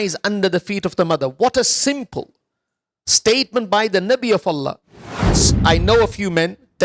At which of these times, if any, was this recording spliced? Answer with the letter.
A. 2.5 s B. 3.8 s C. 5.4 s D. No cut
C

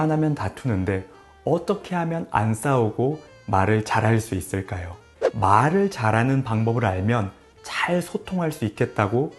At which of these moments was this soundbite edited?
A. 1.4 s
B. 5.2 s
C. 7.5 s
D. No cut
B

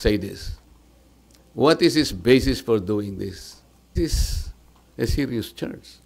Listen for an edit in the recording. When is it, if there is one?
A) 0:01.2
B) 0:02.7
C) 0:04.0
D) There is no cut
C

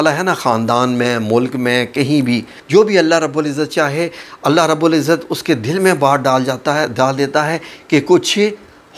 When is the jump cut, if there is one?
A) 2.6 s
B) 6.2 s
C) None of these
A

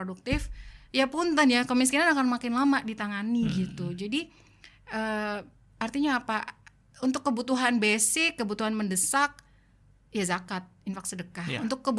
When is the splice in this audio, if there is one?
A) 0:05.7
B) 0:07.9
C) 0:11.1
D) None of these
D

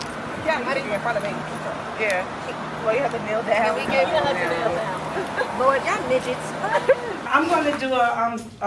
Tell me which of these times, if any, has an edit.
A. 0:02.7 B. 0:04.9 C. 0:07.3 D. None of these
C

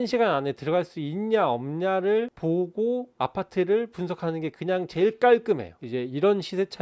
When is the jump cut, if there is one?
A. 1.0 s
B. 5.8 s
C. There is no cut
B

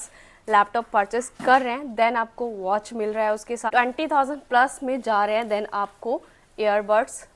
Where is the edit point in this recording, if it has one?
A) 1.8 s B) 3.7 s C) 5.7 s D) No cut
B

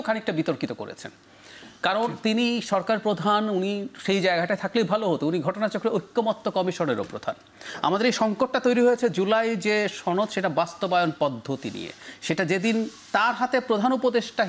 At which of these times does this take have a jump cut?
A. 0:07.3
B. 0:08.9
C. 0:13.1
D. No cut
D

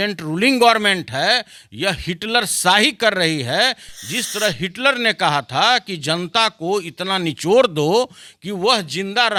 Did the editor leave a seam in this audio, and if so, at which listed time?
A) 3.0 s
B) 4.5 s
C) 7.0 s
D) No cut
D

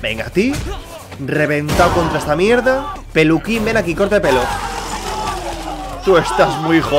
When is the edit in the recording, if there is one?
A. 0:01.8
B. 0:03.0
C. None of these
B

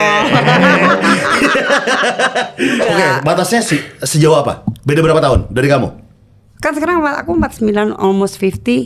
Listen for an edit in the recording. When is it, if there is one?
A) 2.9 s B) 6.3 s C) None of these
A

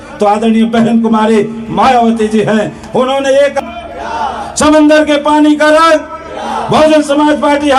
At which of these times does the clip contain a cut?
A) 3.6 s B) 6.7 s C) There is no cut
A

